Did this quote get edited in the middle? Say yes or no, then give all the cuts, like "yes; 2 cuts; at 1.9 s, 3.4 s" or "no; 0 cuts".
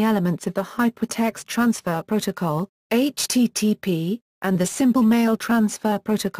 yes; 1 cut; at 4.6 s